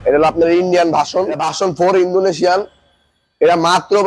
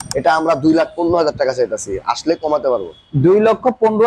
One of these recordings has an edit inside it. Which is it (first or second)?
first